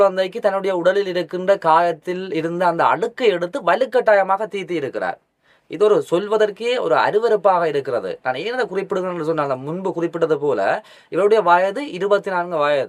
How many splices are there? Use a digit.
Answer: 0